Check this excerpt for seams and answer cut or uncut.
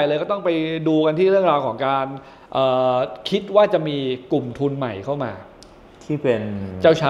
uncut